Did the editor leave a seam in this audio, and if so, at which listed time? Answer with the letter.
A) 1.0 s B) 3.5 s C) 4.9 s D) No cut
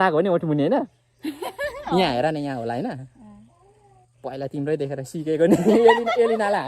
D